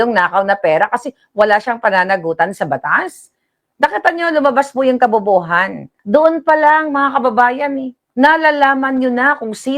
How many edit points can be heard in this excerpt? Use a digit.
2